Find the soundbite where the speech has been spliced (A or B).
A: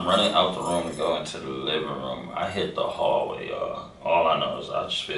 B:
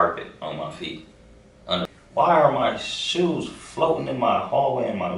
B